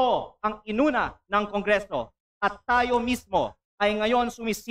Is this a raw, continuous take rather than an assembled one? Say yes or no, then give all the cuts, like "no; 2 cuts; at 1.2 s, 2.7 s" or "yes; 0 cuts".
no; 1 cut; at 2.2 s